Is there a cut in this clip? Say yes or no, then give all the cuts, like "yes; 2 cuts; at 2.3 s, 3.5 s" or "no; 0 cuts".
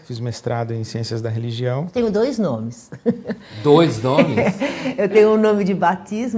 yes; 1 cut; at 5.2 s